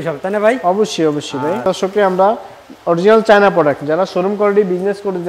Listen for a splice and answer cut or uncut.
cut